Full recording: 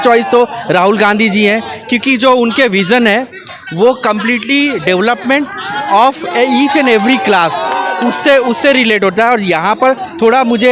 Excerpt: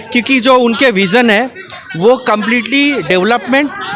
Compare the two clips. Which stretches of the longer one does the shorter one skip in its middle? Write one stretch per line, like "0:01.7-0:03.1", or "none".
none